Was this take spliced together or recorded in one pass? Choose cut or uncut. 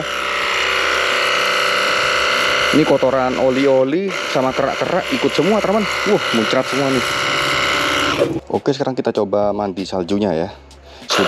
cut